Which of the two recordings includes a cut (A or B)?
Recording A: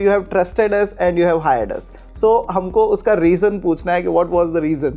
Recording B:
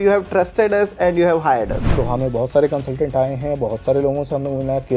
B